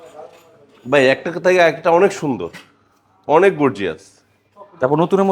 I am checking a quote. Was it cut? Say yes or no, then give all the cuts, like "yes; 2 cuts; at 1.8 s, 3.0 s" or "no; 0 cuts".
no; 0 cuts